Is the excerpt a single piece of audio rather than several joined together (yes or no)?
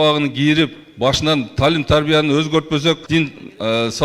no